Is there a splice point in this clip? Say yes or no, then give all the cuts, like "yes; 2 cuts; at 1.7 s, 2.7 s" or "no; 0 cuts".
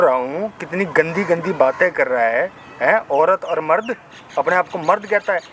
no; 0 cuts